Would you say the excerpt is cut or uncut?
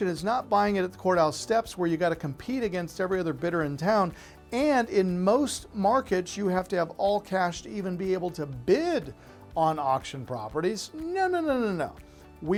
uncut